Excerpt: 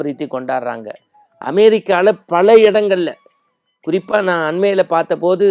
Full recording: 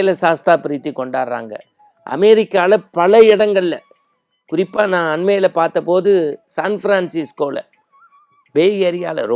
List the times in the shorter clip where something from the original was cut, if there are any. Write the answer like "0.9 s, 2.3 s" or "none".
none